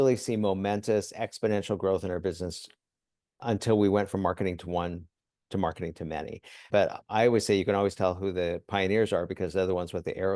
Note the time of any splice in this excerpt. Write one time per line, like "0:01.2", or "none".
0:06.6